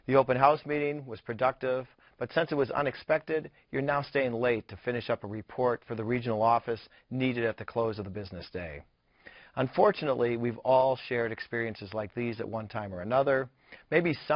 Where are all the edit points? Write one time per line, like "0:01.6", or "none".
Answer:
0:05.1